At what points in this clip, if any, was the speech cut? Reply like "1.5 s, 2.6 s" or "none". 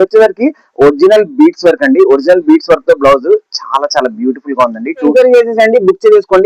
5.1 s